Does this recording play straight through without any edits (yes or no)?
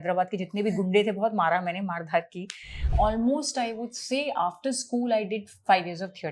no